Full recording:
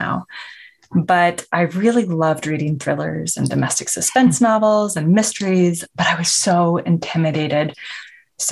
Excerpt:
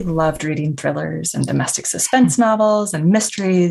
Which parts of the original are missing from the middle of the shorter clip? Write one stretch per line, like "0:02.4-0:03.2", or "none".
none